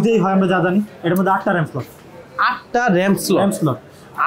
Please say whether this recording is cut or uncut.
uncut